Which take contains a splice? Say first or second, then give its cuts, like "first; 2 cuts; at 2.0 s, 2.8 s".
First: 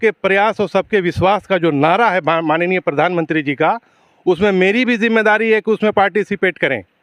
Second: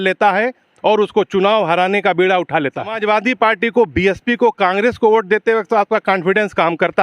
second; 1 cut; at 2.9 s